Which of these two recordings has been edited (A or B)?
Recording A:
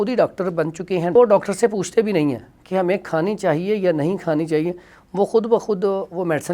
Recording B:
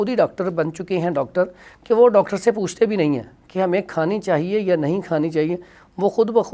A